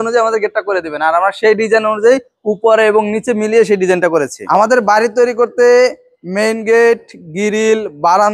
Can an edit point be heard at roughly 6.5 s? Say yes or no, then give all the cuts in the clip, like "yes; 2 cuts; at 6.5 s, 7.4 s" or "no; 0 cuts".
no; 1 cut; at 4.4 s